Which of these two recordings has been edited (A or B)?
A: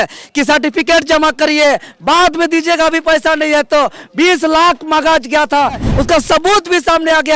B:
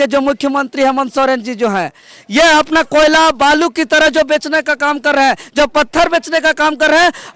A